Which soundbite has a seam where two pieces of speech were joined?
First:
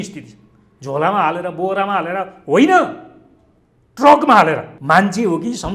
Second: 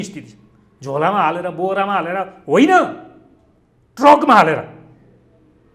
first; 1 cut; at 4.7 s

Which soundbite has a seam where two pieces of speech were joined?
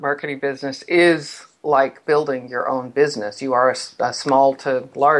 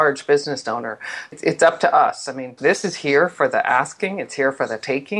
second; 2 cuts; at 1.3 s, 2.6 s

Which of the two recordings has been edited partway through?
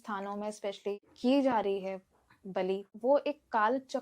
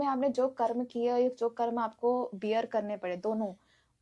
first; 2 cuts; at 0.9 s, 2.9 s

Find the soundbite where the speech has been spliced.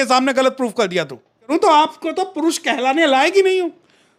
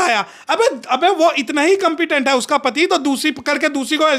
first; 1 cut; at 1.5 s

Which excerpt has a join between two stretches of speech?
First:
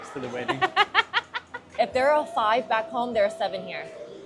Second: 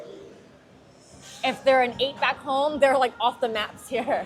first; 1 cut; at 1.7 s

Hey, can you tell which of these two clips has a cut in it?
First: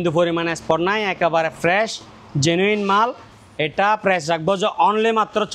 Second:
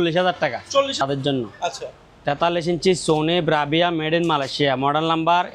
second; 1 cut; at 1.0 s

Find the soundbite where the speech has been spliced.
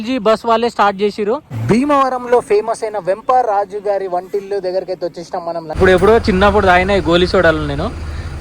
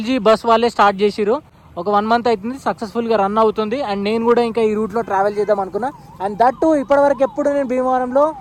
first; 2 cuts; at 1.5 s, 5.7 s

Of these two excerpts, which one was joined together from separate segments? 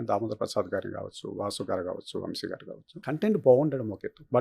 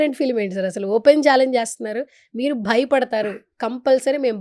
first; 1 cut; at 2.9 s

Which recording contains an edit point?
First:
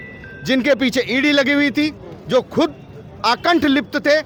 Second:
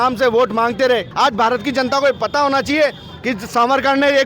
second; 1 cut; at 1.1 s

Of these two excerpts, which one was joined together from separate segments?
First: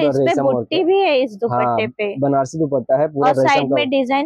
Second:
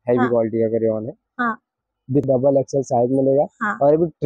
second; 1 cut; at 2.2 s

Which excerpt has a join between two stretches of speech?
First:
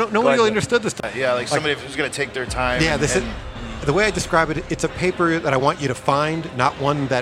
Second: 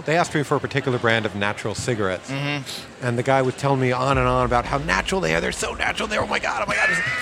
first; 1 cut; at 1.0 s

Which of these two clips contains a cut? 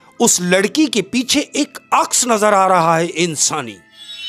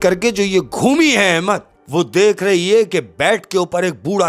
second; 1 cut; at 1.8 s

